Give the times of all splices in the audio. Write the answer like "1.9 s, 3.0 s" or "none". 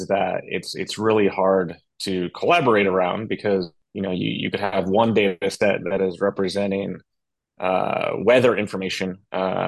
3.8 s